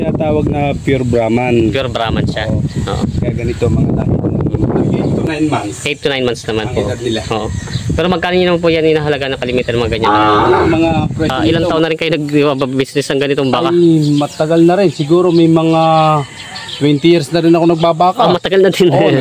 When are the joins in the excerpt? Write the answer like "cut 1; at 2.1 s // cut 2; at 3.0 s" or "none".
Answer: cut 1; at 5.3 s // cut 2; at 11.5 s